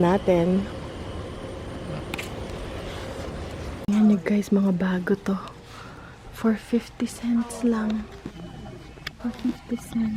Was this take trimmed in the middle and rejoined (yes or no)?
yes